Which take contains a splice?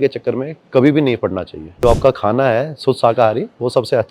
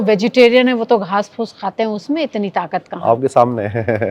first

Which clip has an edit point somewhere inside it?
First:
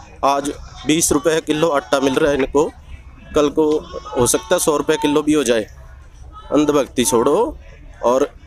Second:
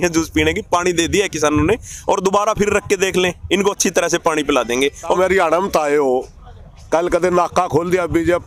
second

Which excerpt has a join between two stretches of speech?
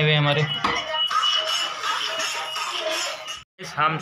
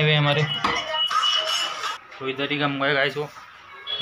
second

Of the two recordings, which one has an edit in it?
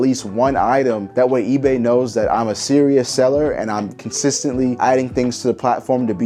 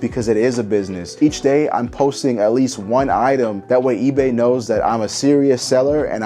second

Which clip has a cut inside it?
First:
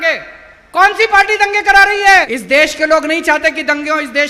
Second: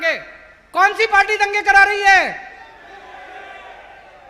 first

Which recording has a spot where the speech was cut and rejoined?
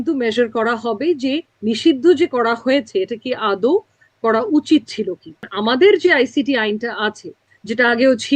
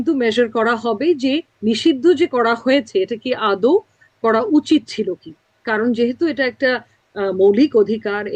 first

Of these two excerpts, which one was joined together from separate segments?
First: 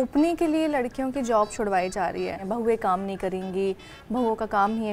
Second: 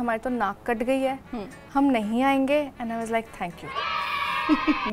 first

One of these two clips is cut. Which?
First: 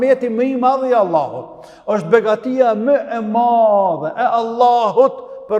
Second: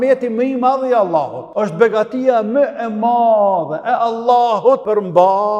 second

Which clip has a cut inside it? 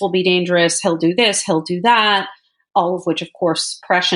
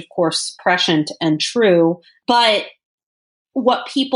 second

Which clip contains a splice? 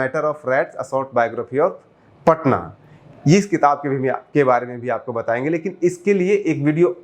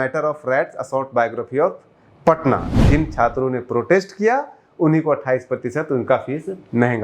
second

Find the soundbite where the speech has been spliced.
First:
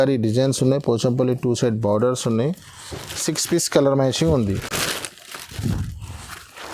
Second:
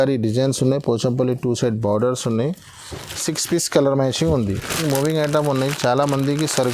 second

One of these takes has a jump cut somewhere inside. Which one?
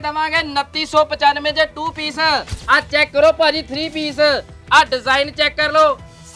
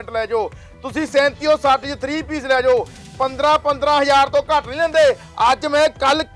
first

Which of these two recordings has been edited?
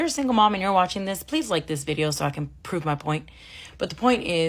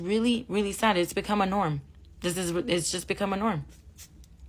first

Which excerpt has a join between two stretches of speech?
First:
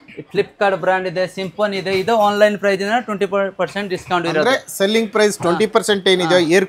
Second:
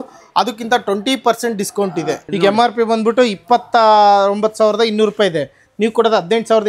second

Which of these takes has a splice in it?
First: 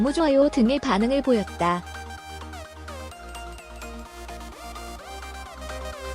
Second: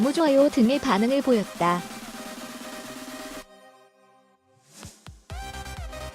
second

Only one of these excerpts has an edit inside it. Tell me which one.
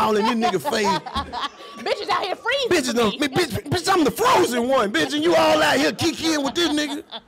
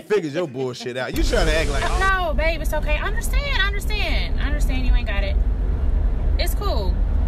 second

